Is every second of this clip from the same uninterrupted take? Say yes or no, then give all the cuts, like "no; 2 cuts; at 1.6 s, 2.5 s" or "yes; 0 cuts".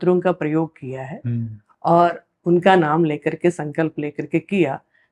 yes; 0 cuts